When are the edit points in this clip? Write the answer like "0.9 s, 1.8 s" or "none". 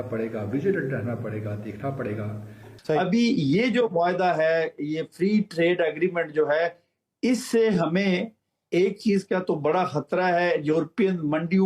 3.0 s